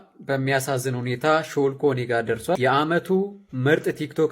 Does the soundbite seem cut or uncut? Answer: cut